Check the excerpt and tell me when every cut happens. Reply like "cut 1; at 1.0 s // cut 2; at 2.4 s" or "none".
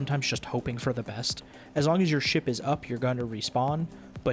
cut 1; at 1.6 s

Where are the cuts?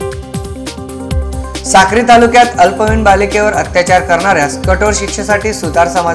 cut 1; at 1.0 s

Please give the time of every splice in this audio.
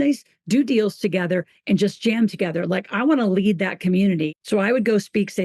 cut 1; at 4.3 s

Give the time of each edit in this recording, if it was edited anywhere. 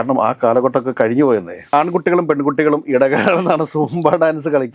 cut 1; at 1.7 s

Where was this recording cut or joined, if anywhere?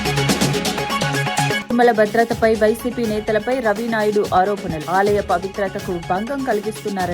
cut 1; at 1.6 s

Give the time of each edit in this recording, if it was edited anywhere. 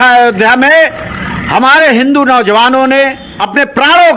cut 1; at 3.2 s

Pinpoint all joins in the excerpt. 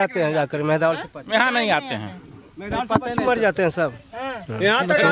none

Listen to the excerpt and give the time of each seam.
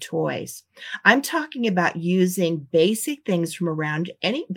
none

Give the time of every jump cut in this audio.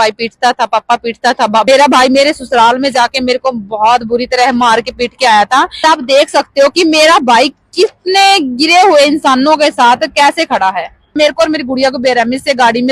cut 1; at 1.7 s // cut 2; at 5.8 s // cut 3; at 11.1 s

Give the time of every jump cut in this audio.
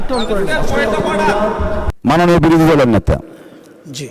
cut 1; at 1.9 s

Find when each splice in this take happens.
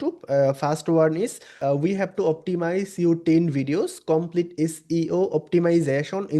cut 1; at 1.5 s

